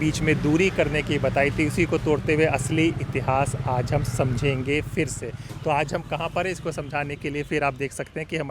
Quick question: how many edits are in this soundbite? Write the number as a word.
zero